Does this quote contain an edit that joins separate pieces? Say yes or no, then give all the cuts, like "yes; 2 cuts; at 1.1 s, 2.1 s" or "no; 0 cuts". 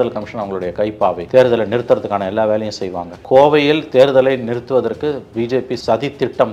yes; 2 cuts; at 1.2 s, 3.1 s